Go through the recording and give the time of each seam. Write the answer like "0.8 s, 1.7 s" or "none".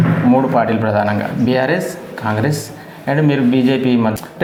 none